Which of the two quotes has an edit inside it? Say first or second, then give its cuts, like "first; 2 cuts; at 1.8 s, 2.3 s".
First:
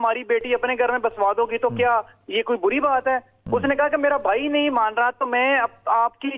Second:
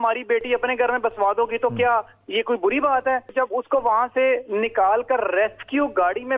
second; 1 cut; at 3.3 s